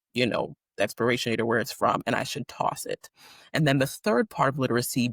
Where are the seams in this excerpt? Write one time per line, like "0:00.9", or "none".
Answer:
none